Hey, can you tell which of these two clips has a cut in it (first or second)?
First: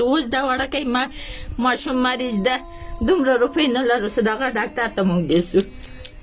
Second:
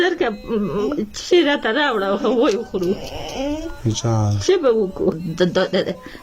second